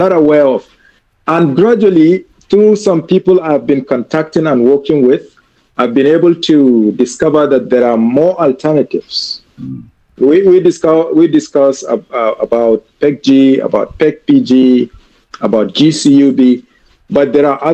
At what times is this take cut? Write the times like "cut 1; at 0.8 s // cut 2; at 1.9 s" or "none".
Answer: none